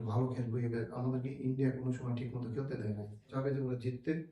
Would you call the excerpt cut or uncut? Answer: cut